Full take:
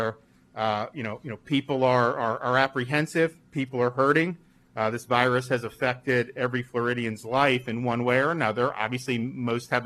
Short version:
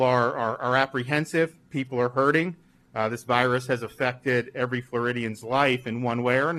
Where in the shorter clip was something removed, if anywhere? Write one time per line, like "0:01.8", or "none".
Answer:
none

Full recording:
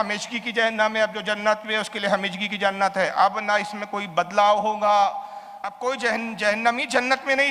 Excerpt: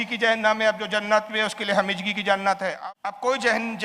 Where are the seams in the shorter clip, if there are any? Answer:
0:02.7

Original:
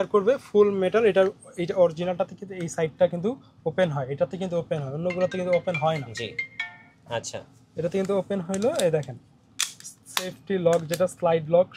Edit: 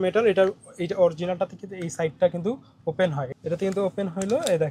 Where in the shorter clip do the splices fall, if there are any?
0:03.3

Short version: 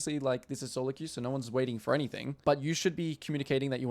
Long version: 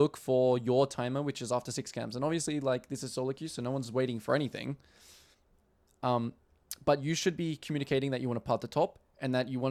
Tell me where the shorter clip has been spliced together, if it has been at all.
0:02.3

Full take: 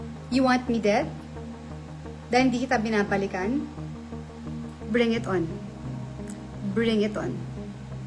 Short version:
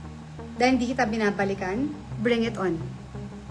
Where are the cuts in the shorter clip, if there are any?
0:02.1

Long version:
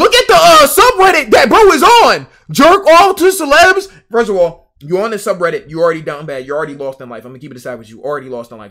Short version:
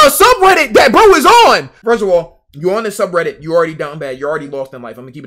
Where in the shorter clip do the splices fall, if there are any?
0:01.7

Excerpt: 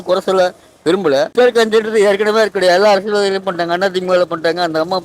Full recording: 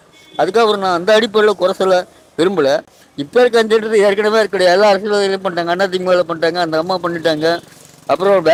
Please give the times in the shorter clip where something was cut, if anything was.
0:01.3

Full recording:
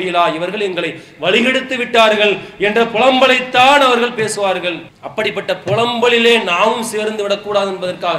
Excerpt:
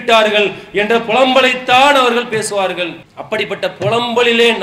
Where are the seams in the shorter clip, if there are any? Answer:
none

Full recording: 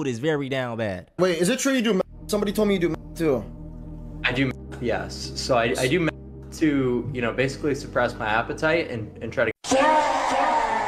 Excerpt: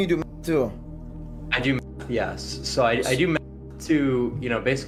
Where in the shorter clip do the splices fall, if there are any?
none

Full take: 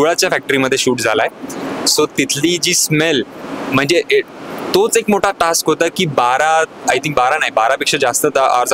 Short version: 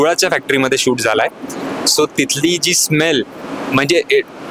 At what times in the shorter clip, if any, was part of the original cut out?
none

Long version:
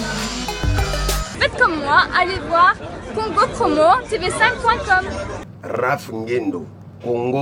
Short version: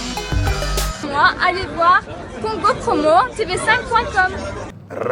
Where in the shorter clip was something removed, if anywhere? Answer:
0:01.0

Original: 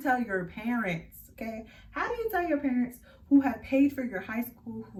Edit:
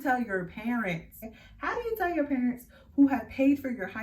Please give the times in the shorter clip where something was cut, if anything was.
0:01.3

